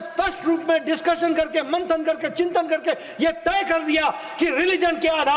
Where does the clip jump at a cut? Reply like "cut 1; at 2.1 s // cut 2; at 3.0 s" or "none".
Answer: none